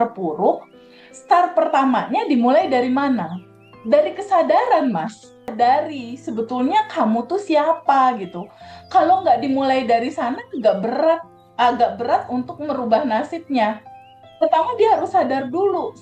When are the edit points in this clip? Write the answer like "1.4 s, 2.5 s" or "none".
5.5 s